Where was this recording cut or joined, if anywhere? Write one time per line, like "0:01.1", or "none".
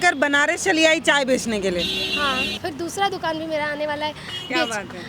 0:02.6